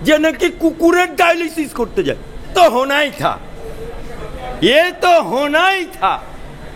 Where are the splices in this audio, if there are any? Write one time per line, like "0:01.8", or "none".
0:02.5

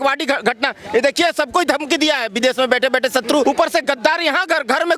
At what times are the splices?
0:03.4

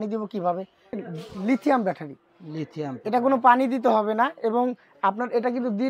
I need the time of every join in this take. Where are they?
0:01.0

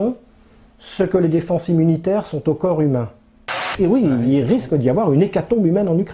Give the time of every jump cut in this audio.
0:03.7

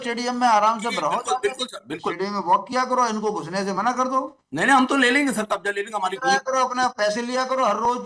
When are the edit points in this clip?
0:02.2
0:06.2

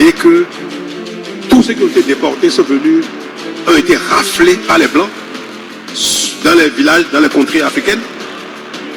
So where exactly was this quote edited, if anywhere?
0:08.0

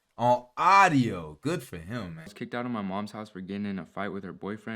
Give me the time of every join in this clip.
0:02.3

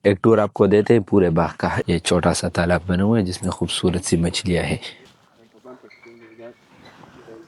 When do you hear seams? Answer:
0:01.8
0:05.1

